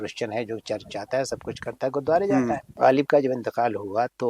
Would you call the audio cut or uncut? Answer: cut